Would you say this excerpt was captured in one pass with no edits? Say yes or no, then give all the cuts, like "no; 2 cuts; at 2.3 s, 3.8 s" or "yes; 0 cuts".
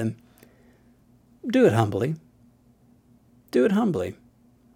yes; 0 cuts